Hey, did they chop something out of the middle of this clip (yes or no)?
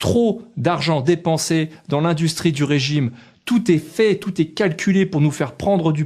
no